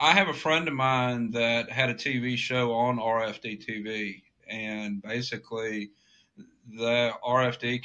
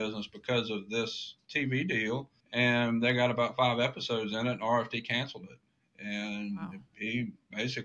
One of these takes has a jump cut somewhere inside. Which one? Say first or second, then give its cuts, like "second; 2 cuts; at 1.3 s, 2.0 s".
second; 1 cut; at 2.4 s